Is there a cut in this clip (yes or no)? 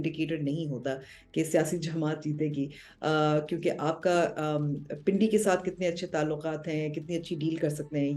no